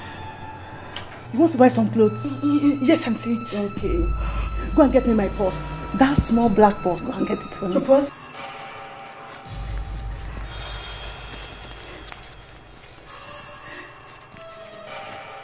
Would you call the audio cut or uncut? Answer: cut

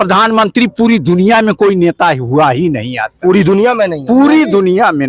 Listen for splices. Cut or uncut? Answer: uncut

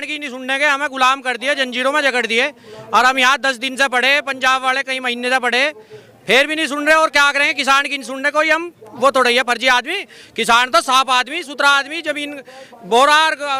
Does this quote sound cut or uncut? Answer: uncut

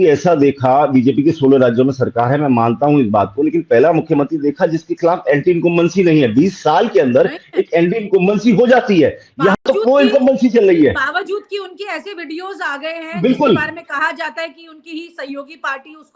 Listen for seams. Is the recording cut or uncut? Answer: uncut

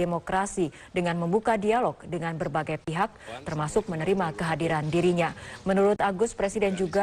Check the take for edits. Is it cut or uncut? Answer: uncut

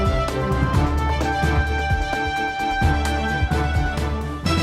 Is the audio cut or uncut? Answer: uncut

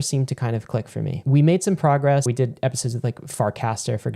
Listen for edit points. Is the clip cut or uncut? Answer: cut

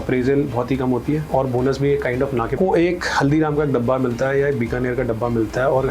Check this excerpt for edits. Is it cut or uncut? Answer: cut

